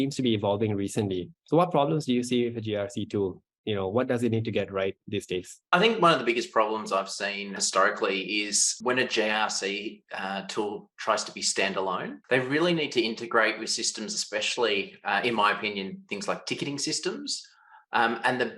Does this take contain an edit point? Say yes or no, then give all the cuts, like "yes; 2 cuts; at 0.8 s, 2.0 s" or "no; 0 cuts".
yes; 4 cuts; at 1.3 s, 5.5 s, 7.6 s, 12.1 s